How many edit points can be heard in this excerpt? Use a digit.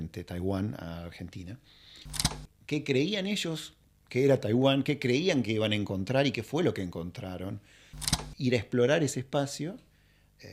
2